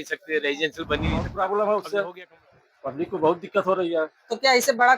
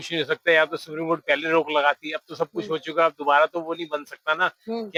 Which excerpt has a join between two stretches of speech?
first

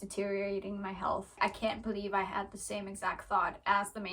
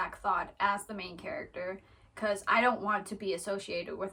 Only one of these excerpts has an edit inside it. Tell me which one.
first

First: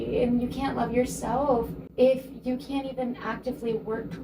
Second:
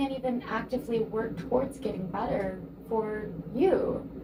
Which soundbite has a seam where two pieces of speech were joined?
first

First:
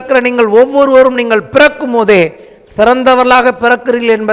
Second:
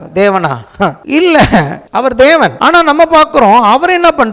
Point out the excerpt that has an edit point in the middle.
second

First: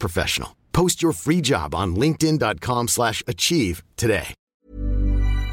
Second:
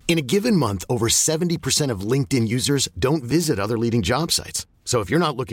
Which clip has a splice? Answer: first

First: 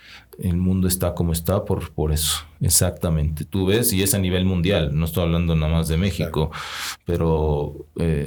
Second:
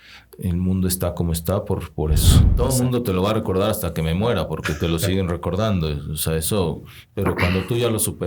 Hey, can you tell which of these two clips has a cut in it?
second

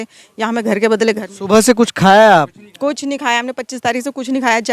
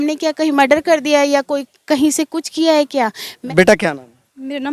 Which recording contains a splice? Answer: second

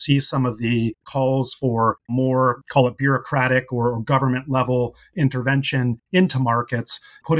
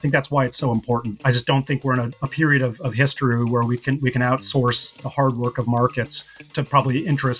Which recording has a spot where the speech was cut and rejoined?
first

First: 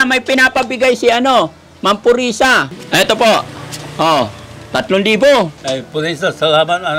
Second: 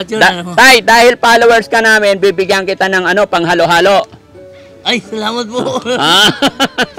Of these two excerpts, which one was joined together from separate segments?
first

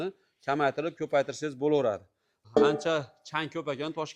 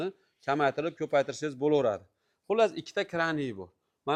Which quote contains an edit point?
first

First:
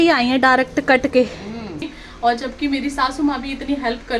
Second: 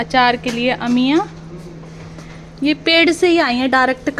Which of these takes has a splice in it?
first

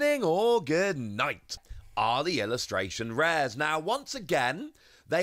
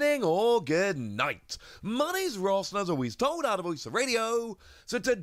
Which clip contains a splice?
first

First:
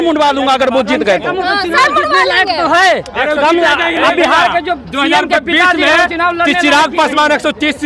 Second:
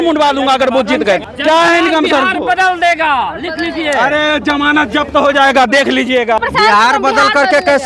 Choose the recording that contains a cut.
second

